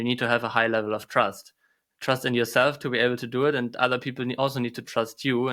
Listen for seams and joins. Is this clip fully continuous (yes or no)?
yes